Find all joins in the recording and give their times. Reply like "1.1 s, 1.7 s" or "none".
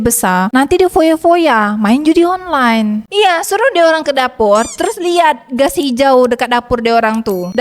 3.1 s